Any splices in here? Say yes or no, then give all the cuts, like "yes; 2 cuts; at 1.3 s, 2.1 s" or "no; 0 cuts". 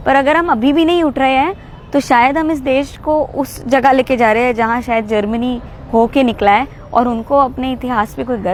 no; 0 cuts